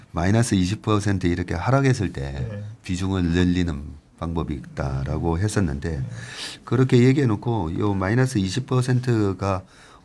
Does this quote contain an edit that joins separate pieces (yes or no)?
no